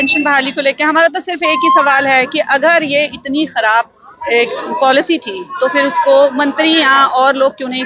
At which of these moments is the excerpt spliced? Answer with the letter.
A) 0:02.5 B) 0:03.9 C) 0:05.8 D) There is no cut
D